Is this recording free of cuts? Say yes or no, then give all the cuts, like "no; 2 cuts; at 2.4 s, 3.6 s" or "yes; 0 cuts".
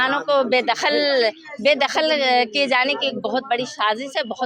yes; 0 cuts